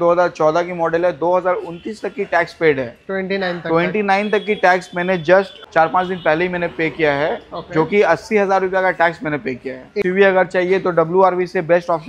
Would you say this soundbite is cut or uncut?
cut